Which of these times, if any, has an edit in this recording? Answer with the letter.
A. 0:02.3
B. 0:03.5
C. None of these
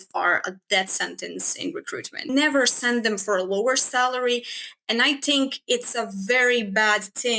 A